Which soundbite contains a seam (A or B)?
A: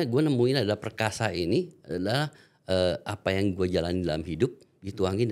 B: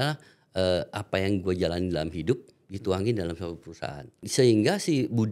B